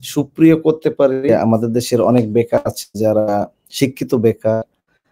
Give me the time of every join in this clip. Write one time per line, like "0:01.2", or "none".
0:01.3